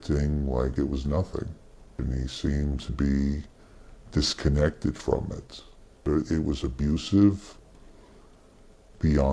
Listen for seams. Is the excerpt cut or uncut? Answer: uncut